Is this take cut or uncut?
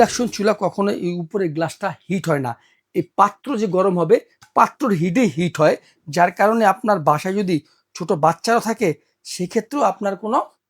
uncut